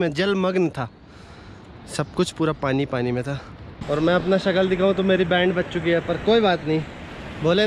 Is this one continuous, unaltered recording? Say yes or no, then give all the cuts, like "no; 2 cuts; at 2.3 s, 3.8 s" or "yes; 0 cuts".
no; 1 cut; at 3.8 s